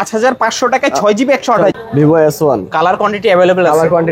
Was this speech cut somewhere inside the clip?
yes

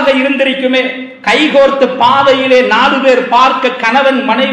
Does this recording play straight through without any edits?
yes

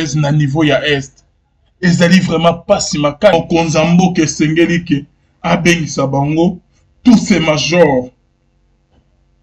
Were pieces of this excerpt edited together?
yes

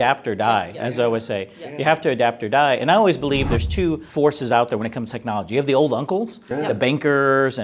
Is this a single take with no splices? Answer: no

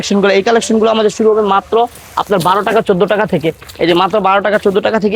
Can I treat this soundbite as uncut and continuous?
yes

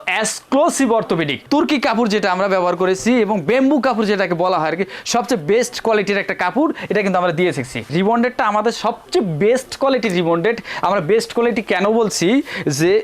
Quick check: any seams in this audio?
yes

